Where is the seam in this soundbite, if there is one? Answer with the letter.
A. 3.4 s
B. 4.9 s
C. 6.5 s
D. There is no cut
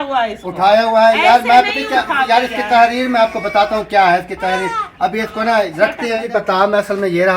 C